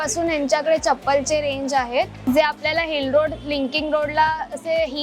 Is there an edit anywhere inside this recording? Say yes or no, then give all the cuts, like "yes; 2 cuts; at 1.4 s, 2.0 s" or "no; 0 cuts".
yes; 1 cut; at 2.3 s